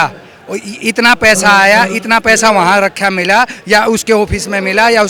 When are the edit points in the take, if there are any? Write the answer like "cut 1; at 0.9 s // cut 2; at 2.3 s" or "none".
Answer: none